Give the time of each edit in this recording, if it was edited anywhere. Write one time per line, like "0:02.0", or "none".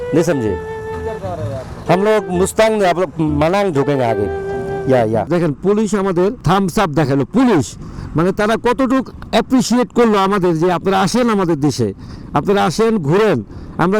0:05.3